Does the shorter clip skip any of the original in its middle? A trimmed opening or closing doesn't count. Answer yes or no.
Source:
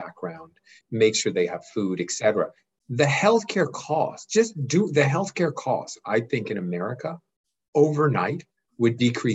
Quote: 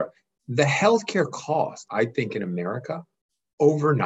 yes